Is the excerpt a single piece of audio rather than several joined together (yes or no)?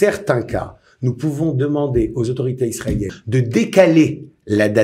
no